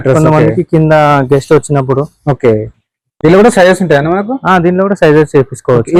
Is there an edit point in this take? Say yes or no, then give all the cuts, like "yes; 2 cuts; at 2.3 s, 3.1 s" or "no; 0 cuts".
no; 0 cuts